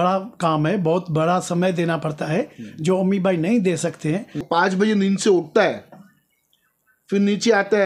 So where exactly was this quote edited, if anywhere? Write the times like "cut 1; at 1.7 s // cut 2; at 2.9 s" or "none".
cut 1; at 4.5 s